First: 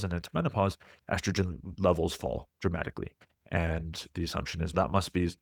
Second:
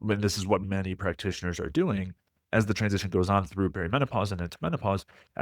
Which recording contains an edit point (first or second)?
second